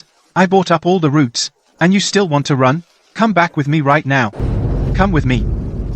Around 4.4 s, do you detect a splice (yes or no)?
yes